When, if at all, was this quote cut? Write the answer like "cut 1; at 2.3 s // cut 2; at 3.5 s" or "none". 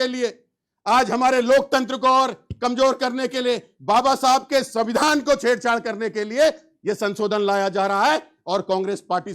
none

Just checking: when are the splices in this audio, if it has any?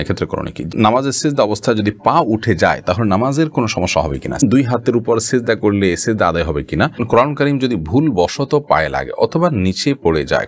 cut 1; at 0.7 s // cut 2; at 4.4 s // cut 3; at 7.0 s

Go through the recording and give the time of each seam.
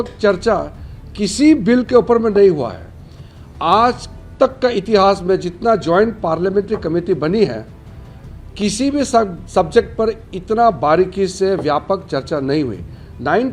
none

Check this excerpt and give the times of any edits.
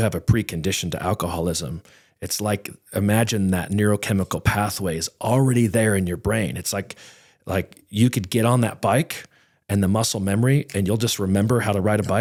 none

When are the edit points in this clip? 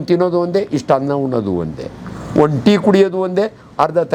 none

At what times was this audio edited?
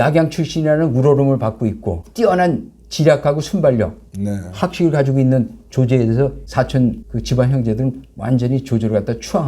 cut 1; at 2.0 s // cut 2; at 6.4 s // cut 3; at 7.1 s

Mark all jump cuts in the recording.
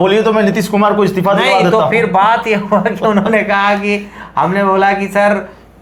none

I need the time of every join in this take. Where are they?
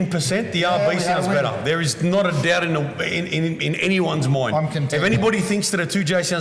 none

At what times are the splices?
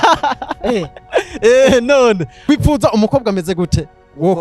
cut 1; at 2.4 s

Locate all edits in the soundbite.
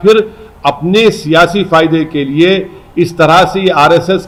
none

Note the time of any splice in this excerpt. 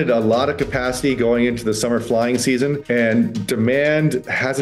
cut 1; at 2.8 s

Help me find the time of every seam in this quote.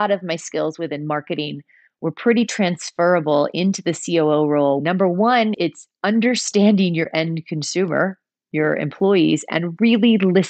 cut 1; at 4.8 s

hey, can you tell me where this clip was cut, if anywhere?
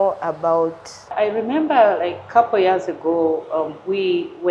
cut 1; at 1.1 s

